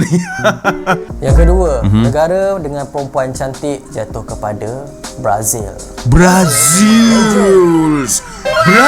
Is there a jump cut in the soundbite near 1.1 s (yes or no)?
yes